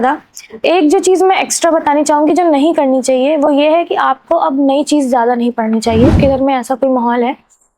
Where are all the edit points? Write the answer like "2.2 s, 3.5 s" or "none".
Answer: 6.2 s